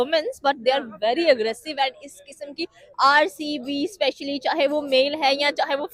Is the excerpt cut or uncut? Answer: uncut